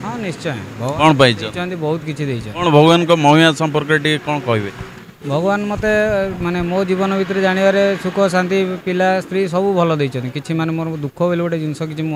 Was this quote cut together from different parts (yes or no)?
no